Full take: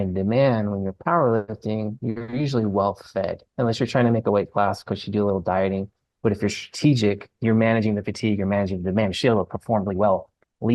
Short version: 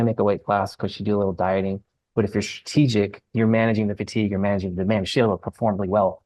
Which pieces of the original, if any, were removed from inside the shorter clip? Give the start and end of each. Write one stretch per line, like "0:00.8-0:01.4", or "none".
none

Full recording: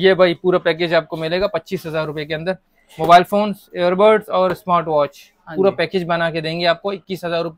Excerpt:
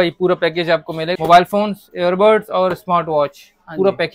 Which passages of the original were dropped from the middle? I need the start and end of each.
0:01.4-0:02.9

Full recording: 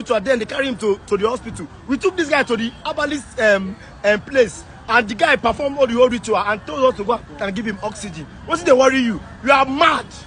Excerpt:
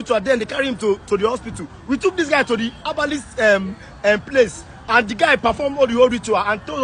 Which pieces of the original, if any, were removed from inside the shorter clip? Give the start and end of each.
none

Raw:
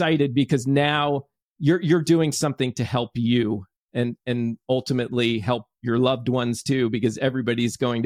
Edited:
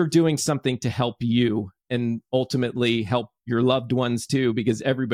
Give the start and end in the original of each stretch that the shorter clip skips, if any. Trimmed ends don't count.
0:03.8-0:04.2

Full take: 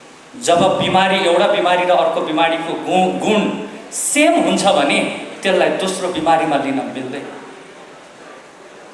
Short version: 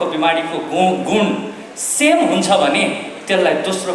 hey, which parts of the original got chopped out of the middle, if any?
none

